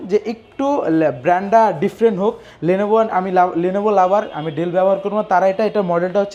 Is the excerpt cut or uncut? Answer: uncut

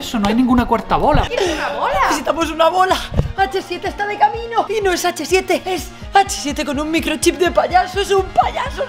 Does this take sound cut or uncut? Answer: cut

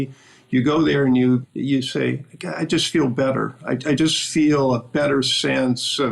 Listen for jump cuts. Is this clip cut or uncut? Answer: cut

